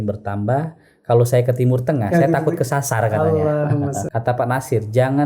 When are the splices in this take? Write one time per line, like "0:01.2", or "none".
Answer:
0:04.0